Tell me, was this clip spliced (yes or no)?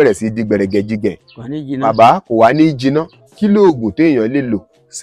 yes